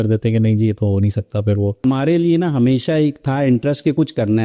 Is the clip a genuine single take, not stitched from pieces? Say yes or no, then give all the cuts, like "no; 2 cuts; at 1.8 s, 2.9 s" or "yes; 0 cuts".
no; 1 cut; at 1.8 s